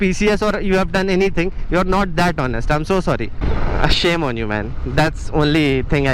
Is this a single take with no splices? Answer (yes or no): no